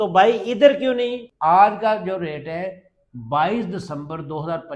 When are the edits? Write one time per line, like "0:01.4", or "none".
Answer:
0:01.2